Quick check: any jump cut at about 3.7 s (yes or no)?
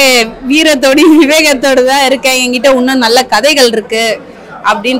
no